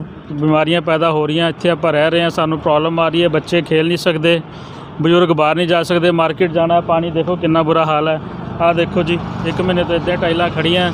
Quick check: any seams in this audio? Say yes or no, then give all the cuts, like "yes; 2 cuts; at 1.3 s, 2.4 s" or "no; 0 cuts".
no; 0 cuts